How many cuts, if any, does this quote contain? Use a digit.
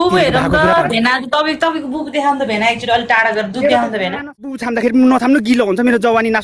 1